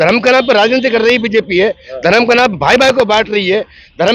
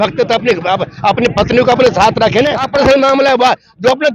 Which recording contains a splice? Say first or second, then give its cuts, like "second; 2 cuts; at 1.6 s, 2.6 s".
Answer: second; 1 cut; at 2.7 s